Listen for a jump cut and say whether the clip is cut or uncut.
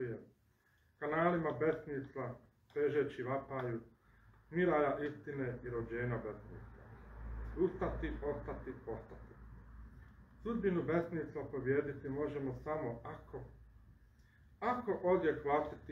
uncut